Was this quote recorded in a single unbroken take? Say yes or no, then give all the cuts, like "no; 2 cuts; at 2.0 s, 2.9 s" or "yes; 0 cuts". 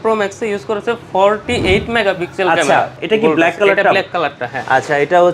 no; 1 cut; at 2.9 s